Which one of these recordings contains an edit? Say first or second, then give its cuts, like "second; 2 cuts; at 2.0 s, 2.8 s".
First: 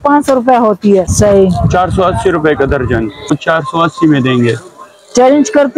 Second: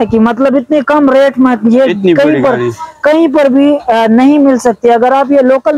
first; 2 cuts; at 1.1 s, 3.2 s